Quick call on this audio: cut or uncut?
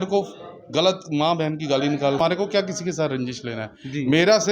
cut